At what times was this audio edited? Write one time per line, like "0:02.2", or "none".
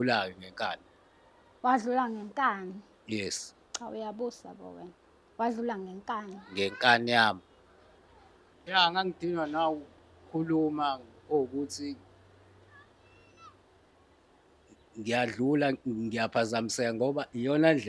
0:08.5